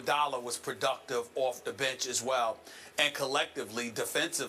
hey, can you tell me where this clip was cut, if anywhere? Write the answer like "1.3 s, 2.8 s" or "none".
2.1 s